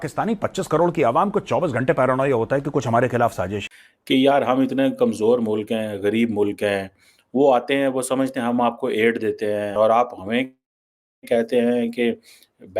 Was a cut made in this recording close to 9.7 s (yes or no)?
yes